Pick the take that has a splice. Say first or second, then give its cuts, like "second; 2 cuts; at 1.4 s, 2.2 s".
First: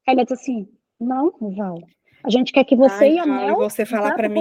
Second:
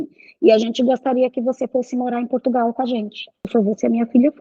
second; 1 cut; at 3.5 s